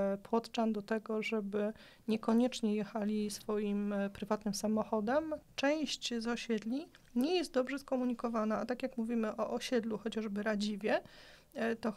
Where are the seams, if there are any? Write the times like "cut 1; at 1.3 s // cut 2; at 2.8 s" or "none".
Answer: cut 1; at 5.4 s